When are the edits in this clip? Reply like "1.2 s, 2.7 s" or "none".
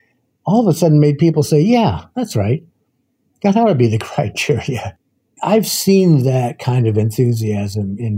5.3 s